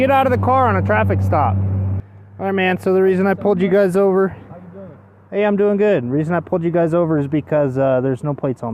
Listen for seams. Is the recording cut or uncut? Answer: cut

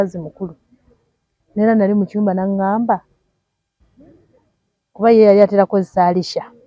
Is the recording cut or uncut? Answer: uncut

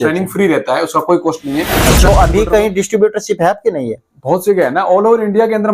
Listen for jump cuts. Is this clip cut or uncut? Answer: cut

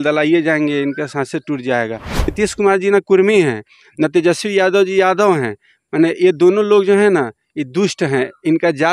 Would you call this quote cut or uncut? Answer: cut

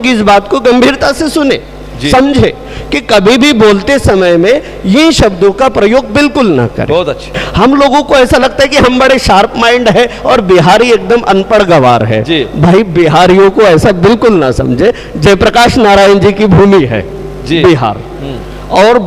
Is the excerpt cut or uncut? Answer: cut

